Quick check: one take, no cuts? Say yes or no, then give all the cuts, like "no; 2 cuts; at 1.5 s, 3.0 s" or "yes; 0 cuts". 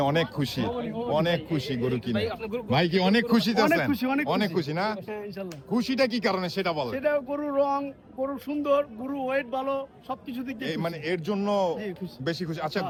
yes; 0 cuts